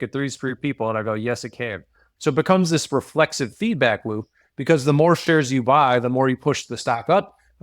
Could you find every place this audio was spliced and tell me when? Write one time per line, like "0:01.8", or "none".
0:02.1

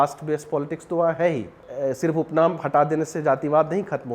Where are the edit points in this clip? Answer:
0:01.6

